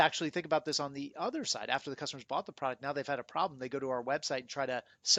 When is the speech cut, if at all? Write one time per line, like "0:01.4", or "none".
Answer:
none